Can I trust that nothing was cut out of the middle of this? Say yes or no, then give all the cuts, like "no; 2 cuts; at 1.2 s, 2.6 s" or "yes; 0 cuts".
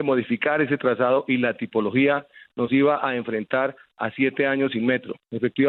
yes; 0 cuts